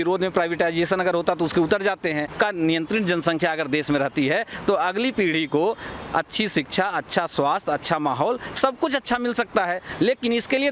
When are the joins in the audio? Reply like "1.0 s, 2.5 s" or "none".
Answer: 2.3 s